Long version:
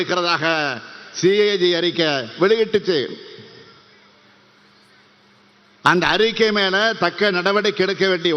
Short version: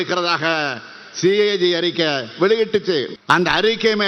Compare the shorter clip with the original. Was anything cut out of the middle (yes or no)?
yes